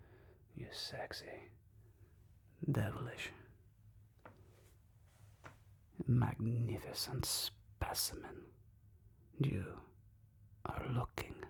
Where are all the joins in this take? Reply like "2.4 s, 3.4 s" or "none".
none